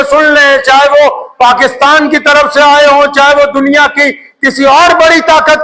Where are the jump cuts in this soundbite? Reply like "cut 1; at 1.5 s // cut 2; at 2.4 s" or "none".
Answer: none